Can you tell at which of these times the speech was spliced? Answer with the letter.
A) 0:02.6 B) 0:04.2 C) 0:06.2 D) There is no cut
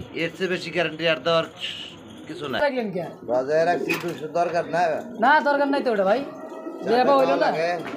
A